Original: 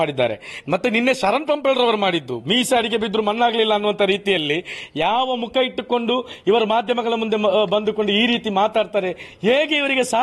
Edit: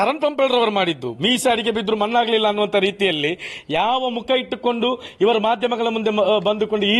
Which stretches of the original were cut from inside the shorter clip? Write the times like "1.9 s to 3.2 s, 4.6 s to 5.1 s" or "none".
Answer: none